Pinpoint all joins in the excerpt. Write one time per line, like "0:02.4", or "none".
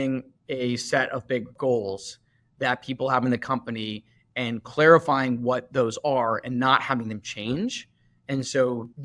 0:01.5